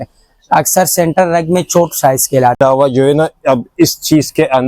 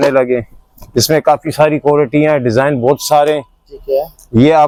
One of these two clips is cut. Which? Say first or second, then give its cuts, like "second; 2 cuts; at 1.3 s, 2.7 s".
first; 1 cut; at 2.6 s